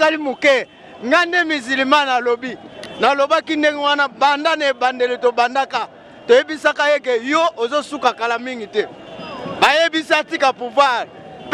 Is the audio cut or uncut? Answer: uncut